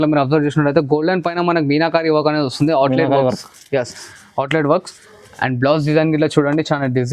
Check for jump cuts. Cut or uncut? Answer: uncut